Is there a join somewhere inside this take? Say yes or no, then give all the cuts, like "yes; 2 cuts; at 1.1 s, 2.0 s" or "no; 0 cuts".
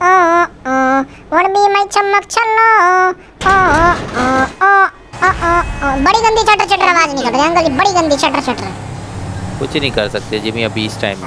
no; 0 cuts